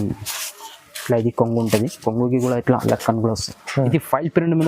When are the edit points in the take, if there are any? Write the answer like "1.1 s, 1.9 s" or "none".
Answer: 3.6 s